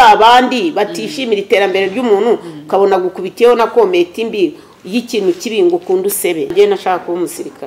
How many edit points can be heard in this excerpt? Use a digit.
1